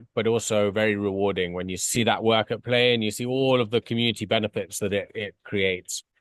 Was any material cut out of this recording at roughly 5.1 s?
no; 1 cut; at 1.9 s

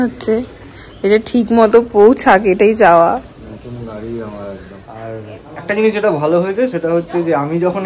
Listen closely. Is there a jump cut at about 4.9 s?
yes; 1 cut; at 4.9 s

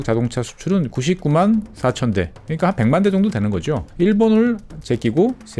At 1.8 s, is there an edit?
no; 1 cut; at 3.8 s

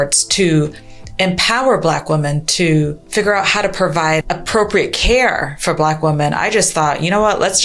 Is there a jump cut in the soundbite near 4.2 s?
yes; 2 cuts; at 3.0 s, 4.2 s

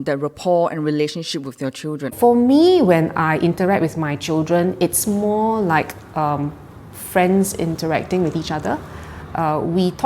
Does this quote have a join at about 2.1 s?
yes; 1 cut; at 2.1 s

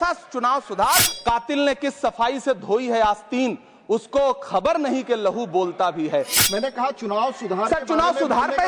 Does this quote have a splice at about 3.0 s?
no; 2 cuts; at 1.1 s, 6.3 s

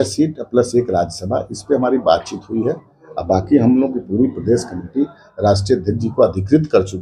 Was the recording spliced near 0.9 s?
no; 0 cuts

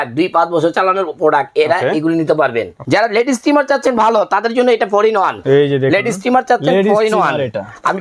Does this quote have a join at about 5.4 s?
yes; 2 cuts; at 2.7 s, 5.4 s

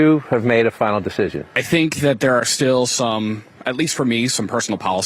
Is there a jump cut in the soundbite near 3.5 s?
no; 1 cut; at 1.5 s

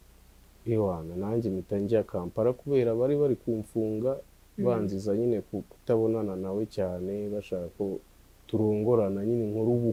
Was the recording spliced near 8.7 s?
no; 0 cuts

